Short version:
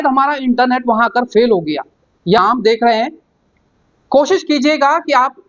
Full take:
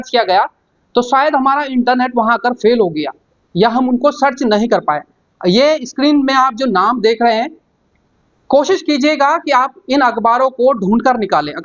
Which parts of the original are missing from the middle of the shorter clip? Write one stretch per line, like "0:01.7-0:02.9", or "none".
0:03.7-0:06.8